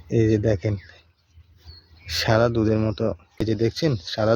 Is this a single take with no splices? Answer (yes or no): no